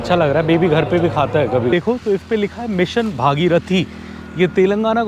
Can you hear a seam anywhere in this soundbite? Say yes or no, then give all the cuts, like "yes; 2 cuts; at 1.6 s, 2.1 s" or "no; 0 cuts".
yes; 1 cut; at 1.7 s